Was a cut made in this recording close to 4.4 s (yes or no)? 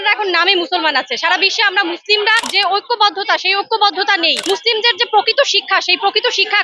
yes